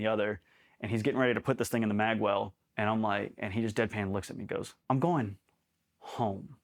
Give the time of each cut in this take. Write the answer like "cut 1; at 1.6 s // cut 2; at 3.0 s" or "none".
cut 1; at 2.6 s // cut 2; at 4.7 s